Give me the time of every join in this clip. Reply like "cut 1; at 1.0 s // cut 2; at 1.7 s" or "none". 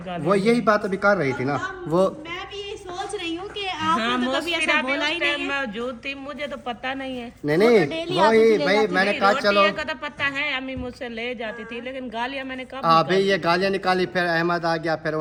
none